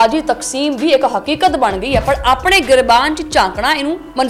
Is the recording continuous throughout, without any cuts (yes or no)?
yes